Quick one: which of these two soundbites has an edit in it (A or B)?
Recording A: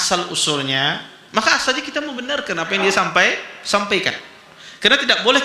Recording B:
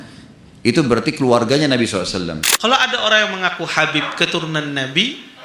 B